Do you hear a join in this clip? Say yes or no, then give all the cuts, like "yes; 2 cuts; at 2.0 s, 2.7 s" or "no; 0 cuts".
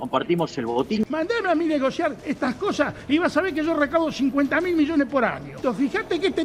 yes; 2 cuts; at 1.0 s, 5.5 s